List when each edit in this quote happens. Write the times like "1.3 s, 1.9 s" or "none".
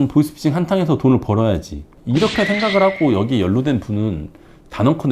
none